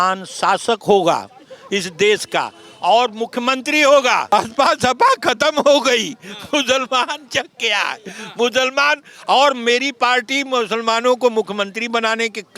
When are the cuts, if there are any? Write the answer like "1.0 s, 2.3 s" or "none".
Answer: 4.3 s